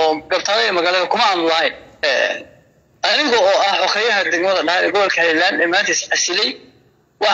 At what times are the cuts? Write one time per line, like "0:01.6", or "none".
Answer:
0:01.9